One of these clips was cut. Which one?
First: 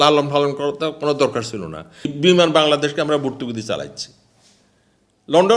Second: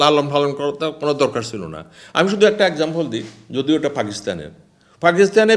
first; 1 cut; at 2.0 s

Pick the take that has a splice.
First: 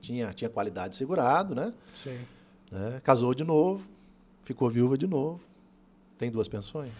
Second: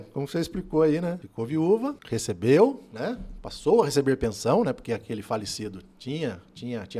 second; 2 cuts; at 1.3 s, 2.0 s

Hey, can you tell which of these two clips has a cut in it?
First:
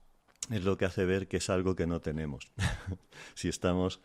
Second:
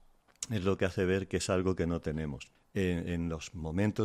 second; 1 cut; at 2.5 s

